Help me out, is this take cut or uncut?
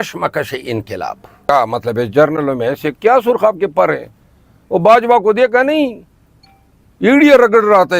cut